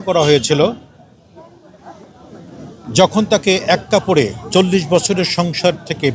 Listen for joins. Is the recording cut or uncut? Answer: uncut